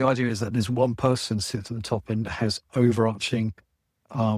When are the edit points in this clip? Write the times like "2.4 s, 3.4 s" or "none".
none